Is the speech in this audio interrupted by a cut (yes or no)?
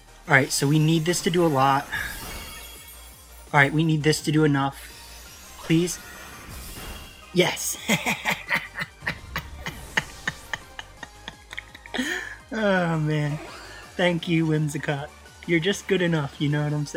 no